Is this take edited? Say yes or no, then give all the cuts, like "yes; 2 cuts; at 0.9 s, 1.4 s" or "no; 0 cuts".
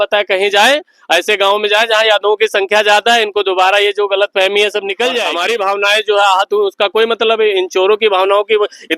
yes; 1 cut; at 5.3 s